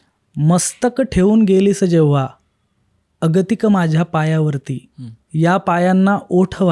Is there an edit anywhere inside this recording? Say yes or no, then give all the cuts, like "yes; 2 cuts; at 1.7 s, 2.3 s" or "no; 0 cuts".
no; 0 cuts